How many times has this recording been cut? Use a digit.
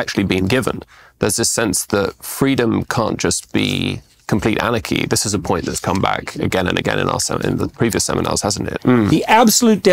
1